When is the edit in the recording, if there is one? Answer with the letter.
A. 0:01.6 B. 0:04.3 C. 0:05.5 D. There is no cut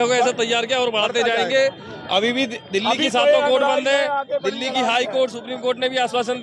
D